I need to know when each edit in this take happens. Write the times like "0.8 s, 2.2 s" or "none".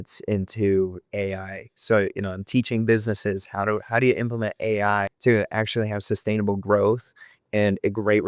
1.1 s, 5.1 s